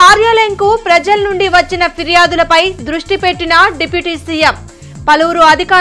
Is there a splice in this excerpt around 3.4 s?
no; 0 cuts

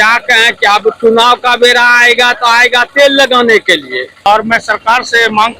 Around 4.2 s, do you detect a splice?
yes; 1 cut; at 4.2 s

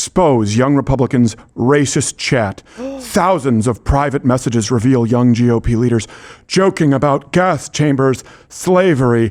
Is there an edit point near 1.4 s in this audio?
no; 0 cuts

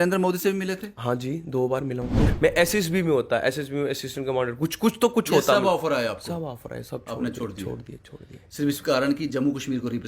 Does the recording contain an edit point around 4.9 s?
no; 1 cut; at 2.2 s

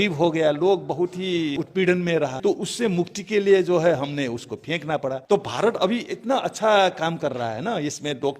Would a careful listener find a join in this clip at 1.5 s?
yes; 3 cuts; at 1.5 s, 2.6 s, 5.2 s

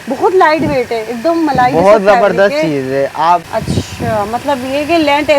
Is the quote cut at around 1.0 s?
no; 1 cut; at 3.4 s

